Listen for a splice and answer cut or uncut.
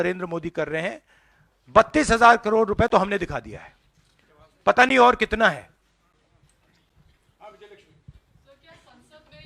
uncut